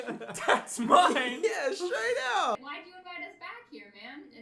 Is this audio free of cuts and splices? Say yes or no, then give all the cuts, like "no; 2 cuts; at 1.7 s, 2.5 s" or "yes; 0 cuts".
no; 1 cut; at 2.6 s